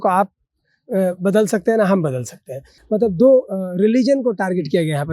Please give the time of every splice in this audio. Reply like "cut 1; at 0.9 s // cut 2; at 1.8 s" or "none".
cut 1; at 2.7 s

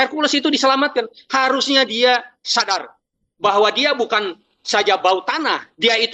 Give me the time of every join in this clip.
none

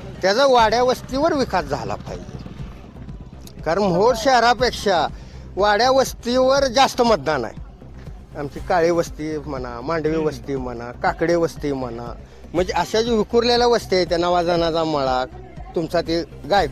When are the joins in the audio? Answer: none

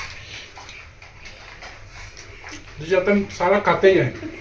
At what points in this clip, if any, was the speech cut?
none

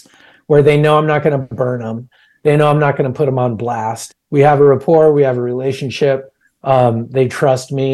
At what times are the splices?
cut 1; at 4.0 s

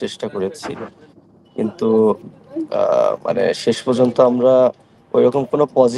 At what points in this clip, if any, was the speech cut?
none

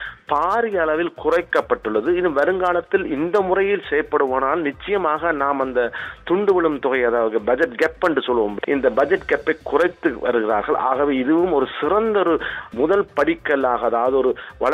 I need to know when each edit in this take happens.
cut 1; at 8.5 s // cut 2; at 12.7 s

